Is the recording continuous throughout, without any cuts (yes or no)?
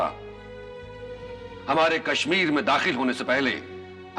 no